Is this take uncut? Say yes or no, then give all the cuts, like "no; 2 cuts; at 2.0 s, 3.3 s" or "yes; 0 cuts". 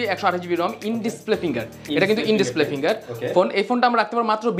yes; 0 cuts